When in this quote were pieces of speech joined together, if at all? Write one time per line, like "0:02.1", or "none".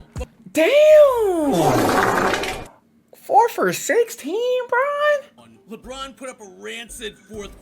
0:05.5